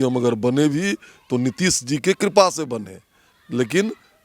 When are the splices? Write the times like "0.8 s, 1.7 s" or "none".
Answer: none